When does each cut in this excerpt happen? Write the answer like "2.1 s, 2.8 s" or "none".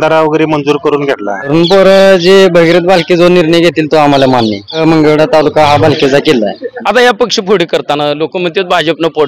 1.5 s, 4.8 s, 6.7 s